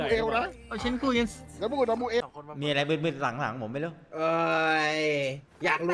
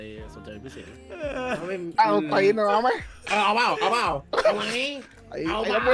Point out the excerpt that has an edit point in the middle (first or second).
first